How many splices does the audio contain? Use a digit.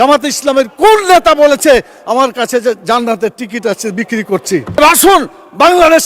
1